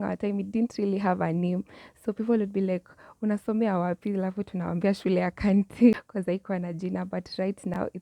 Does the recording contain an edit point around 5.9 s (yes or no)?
yes